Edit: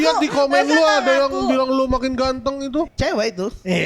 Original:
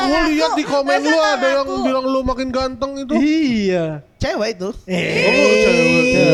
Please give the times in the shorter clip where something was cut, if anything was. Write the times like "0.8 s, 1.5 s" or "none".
2.8 s